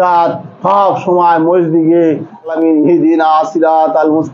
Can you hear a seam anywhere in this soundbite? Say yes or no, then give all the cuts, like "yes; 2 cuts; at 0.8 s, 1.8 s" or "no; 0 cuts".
yes; 1 cut; at 2.5 s